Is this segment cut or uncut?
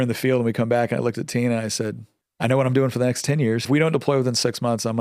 cut